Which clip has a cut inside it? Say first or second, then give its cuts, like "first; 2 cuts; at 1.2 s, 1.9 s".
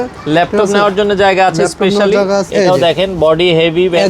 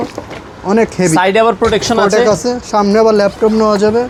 first; 1 cut; at 2.5 s